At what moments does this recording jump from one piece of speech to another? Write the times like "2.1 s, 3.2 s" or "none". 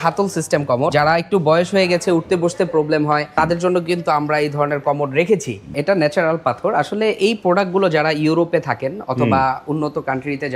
0.9 s, 3.3 s, 5.7 s